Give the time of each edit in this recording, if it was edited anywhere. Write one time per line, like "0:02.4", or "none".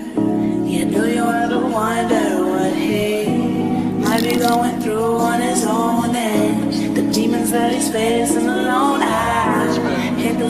0:04.1